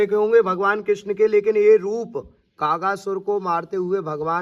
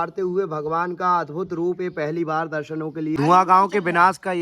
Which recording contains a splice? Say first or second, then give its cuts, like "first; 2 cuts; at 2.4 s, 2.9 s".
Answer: second; 1 cut; at 3.2 s